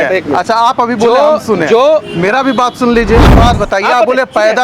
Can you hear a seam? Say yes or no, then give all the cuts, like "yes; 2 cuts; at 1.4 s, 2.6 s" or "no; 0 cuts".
yes; 1 cut; at 3.3 s